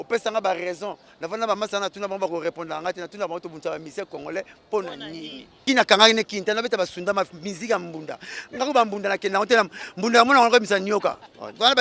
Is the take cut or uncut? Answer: cut